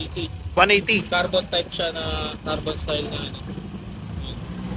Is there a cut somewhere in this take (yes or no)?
no